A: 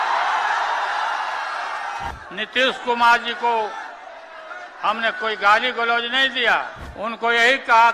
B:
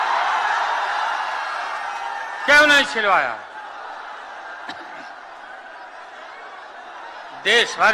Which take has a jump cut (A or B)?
A